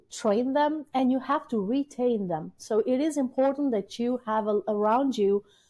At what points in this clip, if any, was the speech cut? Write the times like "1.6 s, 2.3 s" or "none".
none